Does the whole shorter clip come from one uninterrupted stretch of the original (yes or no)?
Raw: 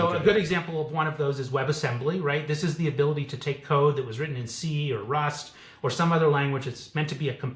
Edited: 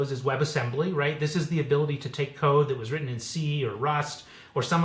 yes